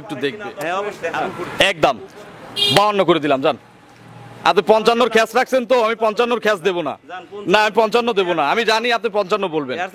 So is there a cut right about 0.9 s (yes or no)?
yes